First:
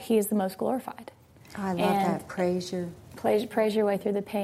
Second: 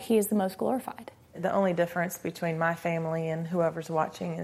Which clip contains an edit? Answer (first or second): second